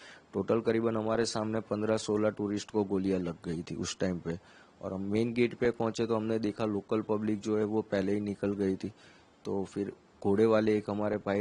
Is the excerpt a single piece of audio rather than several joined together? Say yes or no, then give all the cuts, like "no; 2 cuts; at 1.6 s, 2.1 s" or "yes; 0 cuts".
yes; 0 cuts